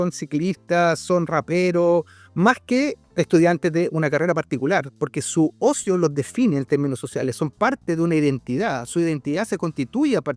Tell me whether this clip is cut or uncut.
uncut